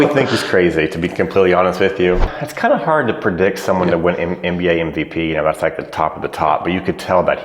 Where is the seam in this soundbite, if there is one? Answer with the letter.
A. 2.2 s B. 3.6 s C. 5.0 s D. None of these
A